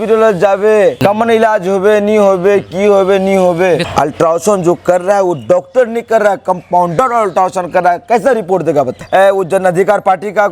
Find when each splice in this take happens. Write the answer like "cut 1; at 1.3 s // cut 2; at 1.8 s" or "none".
cut 1; at 1.0 s // cut 2; at 3.8 s // cut 3; at 9.0 s